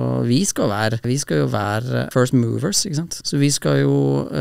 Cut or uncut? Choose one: cut